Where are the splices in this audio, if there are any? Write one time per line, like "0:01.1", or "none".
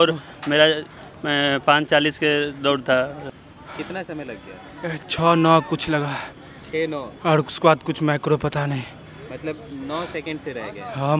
0:03.2